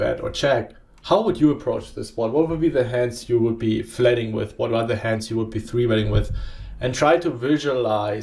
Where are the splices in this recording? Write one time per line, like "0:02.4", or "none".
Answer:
none

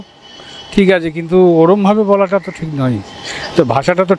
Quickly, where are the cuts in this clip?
none

